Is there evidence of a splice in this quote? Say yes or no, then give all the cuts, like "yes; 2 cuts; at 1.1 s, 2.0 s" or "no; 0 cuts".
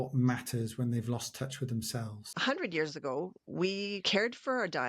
yes; 2 cuts; at 2.3 s, 4.0 s